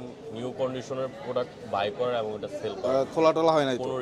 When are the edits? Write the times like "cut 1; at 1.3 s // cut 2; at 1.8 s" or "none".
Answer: cut 1; at 2.8 s